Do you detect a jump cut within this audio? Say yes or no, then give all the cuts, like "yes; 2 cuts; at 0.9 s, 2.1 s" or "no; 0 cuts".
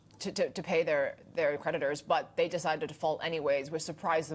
no; 0 cuts